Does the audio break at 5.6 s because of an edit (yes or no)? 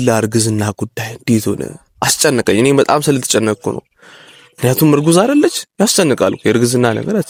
no